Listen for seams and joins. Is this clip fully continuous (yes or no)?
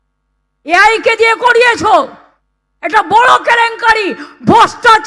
yes